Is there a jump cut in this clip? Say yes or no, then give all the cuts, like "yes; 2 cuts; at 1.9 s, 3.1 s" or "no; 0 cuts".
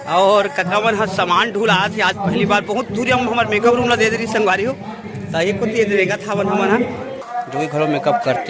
yes; 1 cut; at 7.2 s